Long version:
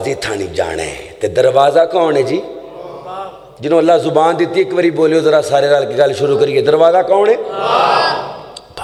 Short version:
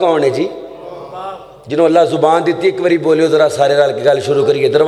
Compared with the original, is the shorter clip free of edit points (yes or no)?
yes